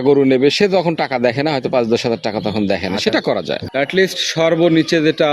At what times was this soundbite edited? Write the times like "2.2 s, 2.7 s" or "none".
3.6 s